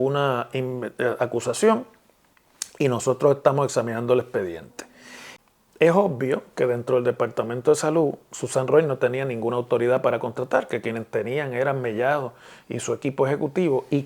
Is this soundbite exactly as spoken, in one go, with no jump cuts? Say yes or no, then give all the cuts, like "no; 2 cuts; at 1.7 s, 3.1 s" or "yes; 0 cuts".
no; 1 cut; at 5.3 s